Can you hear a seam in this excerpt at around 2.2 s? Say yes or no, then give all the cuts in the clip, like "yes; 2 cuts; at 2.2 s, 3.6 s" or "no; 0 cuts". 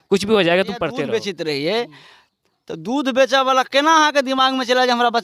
no; 1 cut; at 1.0 s